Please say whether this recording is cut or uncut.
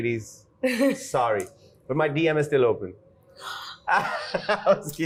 uncut